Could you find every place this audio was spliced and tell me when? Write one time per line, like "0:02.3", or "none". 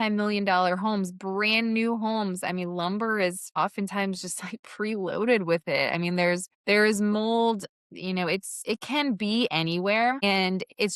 0:03.4
0:06.5
0:08.5
0:10.2